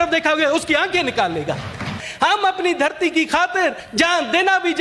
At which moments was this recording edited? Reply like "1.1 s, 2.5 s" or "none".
2.0 s, 3.8 s

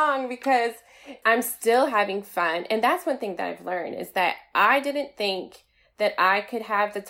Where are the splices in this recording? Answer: 1.1 s

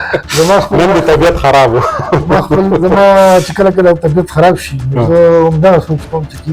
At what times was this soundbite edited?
none

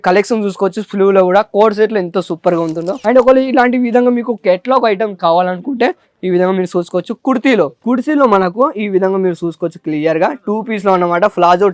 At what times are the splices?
2.9 s, 7.8 s

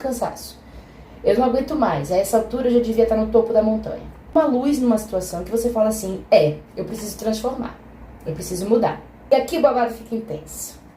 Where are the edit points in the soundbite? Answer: 4.3 s, 9.2 s

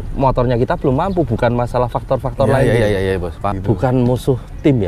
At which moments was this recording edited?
3.6 s

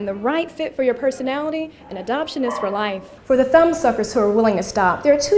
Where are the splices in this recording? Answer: 3.1 s

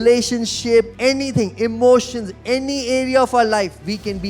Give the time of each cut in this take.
0.9 s

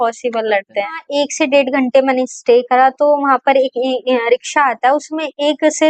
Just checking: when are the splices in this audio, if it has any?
1.1 s

